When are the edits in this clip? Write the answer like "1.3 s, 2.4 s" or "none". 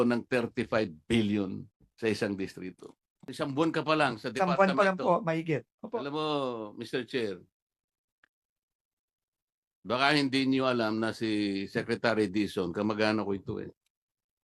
3.3 s